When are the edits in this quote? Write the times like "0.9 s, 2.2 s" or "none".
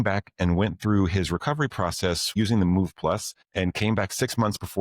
2.3 s, 3.4 s